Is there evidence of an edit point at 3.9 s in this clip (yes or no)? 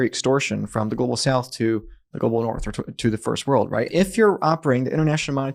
yes